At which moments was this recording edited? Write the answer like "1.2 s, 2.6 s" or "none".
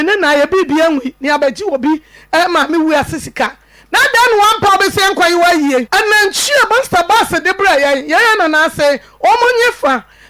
5.9 s